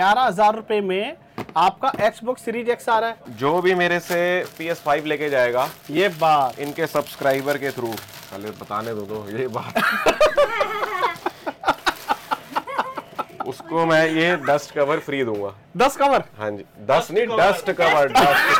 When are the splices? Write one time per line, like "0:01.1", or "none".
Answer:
0:03.2